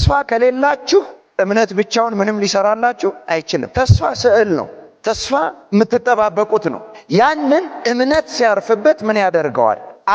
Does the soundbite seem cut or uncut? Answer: uncut